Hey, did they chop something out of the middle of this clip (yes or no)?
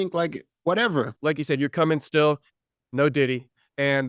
yes